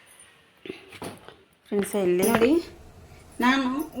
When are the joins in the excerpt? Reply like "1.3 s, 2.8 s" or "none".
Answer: 2.3 s